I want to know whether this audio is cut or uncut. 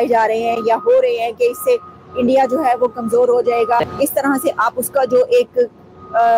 cut